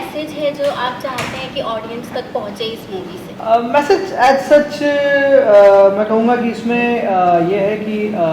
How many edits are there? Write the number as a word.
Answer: zero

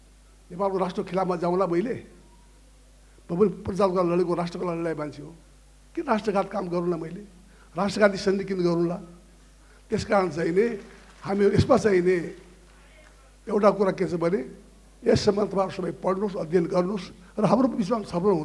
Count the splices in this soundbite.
zero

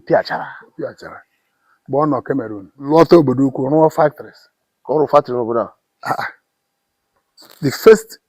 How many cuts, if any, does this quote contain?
one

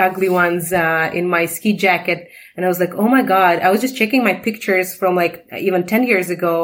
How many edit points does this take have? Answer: zero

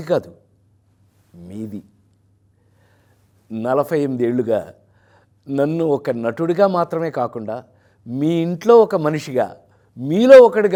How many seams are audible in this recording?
zero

